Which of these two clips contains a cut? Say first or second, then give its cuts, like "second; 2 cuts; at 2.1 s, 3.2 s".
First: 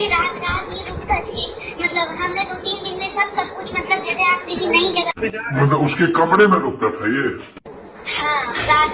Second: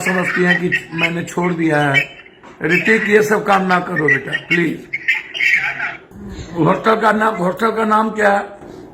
second; 1 cut; at 6.2 s